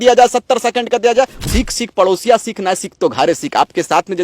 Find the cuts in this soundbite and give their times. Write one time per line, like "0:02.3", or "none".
0:01.4